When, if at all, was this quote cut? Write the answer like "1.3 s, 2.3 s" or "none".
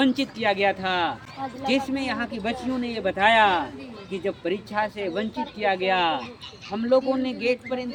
none